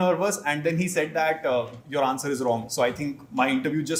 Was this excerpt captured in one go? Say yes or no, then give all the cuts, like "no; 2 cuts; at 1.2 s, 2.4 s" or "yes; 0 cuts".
yes; 0 cuts